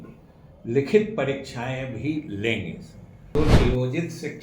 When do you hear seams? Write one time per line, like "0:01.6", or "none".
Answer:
0:03.3

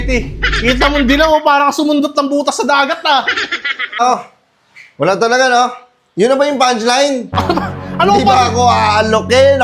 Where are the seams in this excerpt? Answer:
0:04.0

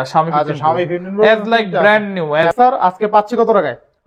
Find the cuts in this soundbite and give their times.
0:02.4

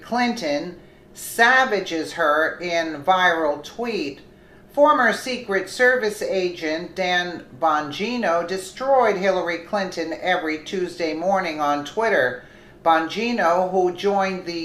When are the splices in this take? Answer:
none

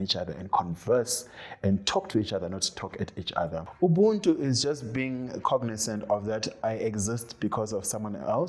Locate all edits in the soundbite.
0:03.6

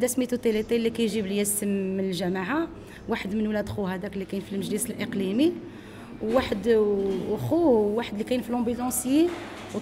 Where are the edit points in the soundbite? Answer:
none

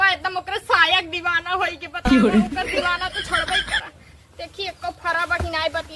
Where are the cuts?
none

